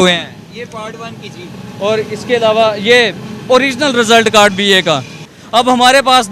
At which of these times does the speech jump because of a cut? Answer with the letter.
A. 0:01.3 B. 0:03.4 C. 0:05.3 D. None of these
C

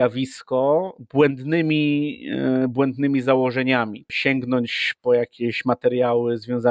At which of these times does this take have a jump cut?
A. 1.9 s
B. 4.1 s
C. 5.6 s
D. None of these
B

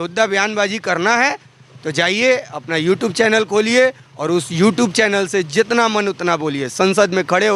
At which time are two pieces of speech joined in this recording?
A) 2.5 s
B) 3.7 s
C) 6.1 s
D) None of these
D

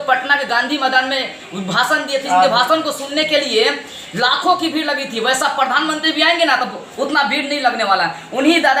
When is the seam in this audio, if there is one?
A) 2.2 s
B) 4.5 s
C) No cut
C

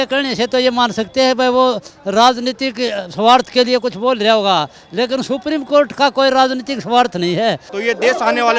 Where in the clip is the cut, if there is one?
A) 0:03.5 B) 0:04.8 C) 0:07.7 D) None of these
C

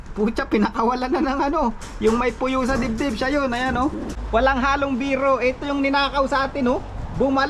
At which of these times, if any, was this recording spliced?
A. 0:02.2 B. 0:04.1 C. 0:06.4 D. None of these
B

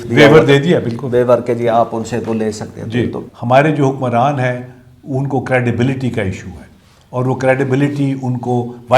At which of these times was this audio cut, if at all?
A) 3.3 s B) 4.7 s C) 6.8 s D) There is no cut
A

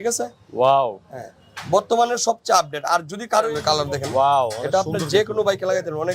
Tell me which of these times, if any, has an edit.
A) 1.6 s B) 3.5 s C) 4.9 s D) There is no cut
B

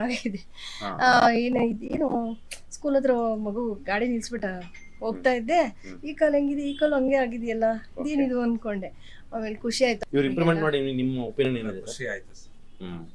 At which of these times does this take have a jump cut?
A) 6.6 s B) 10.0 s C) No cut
B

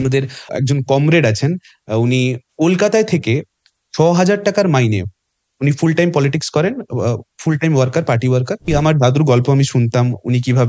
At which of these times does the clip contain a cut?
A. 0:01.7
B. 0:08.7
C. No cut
B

